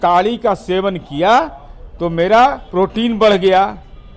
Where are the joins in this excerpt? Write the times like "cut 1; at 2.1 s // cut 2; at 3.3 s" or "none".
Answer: cut 1; at 2.6 s